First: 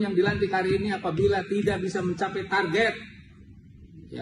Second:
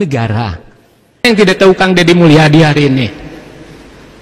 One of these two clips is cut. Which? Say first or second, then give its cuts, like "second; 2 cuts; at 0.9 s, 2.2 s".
second; 1 cut; at 1.2 s